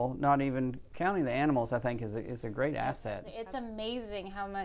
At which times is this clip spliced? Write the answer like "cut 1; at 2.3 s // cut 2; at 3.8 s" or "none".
cut 1; at 3.4 s